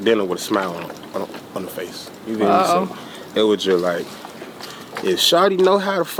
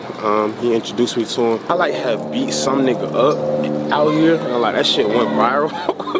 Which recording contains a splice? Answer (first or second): second